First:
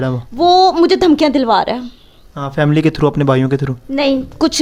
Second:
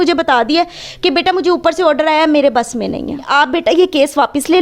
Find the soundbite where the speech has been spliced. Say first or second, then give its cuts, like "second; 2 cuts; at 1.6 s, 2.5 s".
second; 1 cut; at 3.3 s